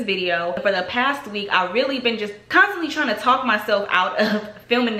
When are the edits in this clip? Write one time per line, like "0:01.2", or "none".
0:02.4